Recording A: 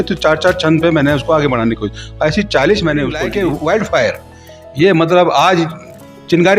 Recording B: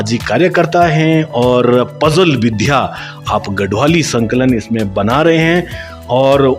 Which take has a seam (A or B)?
A